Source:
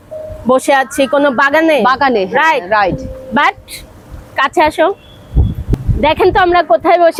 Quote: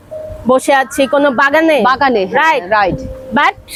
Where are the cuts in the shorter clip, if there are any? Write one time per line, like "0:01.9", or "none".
none

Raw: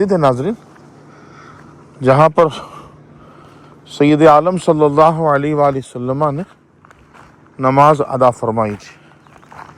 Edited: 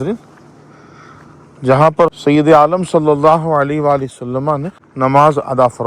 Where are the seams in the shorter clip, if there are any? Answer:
0:02.2
0:04.8

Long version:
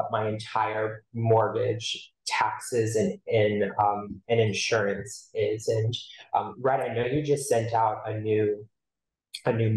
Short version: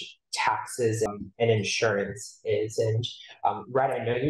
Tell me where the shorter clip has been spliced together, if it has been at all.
0:01.1

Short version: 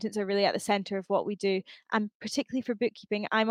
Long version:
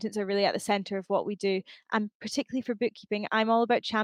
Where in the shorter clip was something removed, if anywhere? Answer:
none

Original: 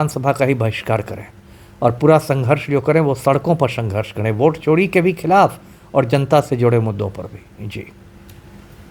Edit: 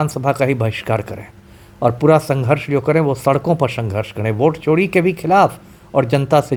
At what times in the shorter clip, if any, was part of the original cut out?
none

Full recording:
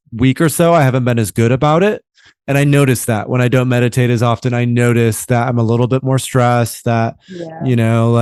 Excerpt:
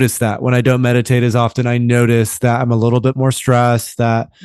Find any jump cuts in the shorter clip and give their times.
none

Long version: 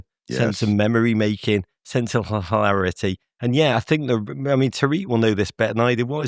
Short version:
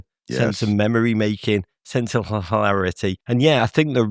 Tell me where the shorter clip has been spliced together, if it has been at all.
0:03.2

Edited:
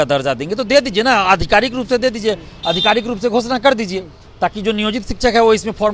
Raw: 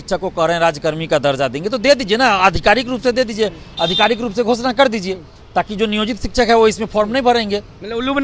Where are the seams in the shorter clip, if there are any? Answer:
none

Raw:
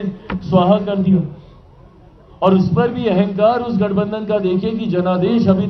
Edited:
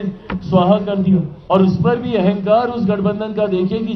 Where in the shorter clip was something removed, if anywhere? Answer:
0:01.3

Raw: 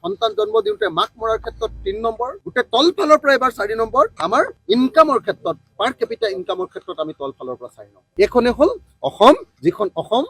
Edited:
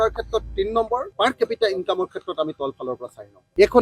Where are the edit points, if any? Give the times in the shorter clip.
0:01.1

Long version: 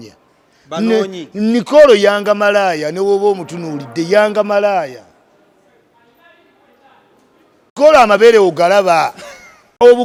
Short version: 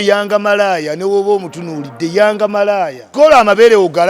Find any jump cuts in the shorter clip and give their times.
0:03.0

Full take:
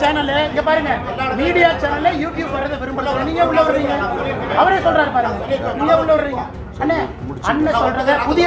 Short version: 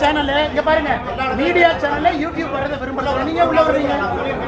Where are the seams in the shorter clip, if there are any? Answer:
none

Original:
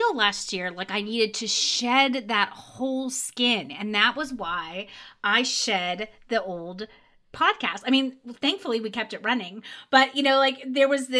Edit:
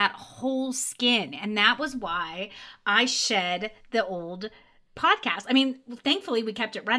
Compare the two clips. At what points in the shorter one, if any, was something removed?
none

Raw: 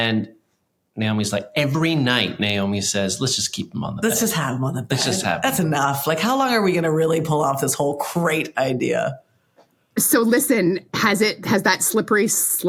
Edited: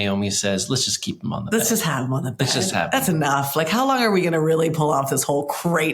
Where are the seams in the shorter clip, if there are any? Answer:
none

